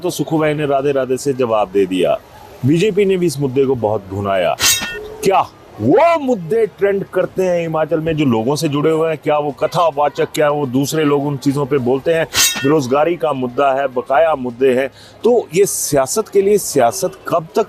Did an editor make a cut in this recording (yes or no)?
no